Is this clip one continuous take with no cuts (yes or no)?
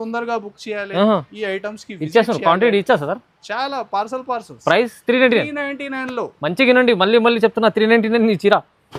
yes